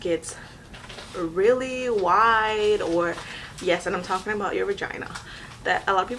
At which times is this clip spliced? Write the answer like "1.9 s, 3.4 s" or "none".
none